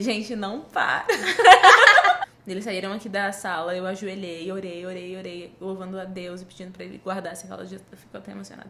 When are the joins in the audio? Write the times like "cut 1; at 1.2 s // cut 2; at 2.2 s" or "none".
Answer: cut 1; at 2.2 s